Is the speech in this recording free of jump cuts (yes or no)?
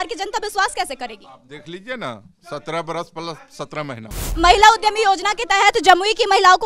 no